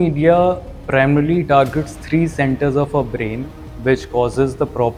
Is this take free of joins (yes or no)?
yes